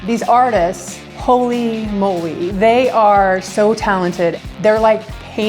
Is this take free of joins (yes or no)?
no